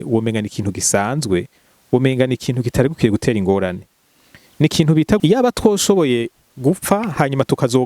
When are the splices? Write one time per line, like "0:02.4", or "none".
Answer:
0:05.2